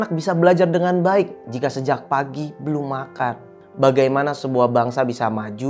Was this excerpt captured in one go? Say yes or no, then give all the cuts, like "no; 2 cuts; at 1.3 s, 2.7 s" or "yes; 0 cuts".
yes; 0 cuts